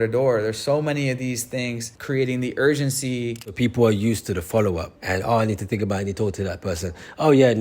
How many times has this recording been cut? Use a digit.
3